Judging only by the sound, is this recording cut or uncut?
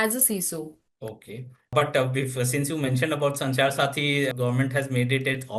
cut